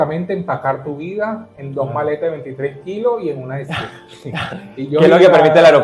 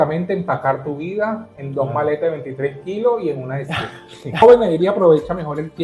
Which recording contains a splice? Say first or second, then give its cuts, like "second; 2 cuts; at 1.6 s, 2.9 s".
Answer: second; 1 cut; at 4.4 s